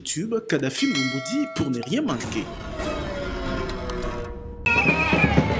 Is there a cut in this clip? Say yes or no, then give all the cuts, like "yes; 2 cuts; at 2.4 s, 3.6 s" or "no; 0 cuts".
yes; 1 cut; at 4.6 s